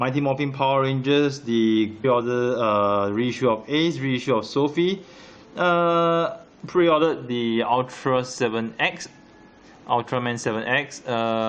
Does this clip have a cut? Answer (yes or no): no